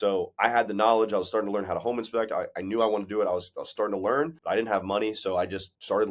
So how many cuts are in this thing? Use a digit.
1